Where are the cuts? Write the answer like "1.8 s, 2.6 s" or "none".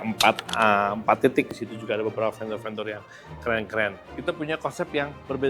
1.6 s, 4.1 s